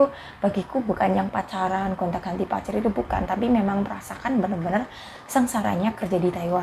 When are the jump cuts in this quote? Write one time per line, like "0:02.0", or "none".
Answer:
none